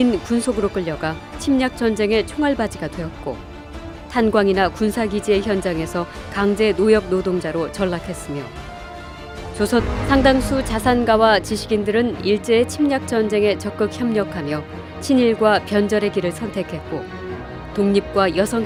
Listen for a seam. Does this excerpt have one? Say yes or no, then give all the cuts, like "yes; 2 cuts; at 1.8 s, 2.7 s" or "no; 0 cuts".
no; 0 cuts